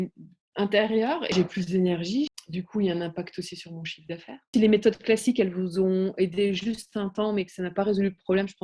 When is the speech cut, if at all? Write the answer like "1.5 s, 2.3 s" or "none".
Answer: 1.3 s, 2.3 s, 4.5 s